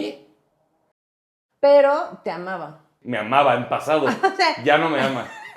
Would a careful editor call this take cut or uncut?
cut